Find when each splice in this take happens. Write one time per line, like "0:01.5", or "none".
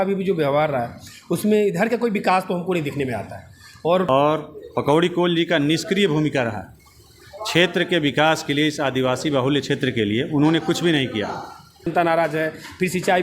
0:04.1
0:11.9

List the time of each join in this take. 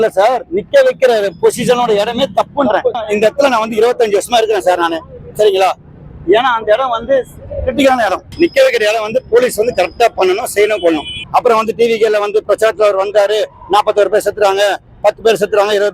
0:03.0
0:08.2
0:11.1

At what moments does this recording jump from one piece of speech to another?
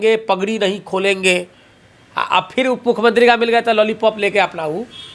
none

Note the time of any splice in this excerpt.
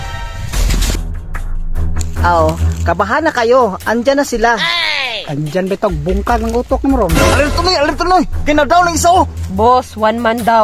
none

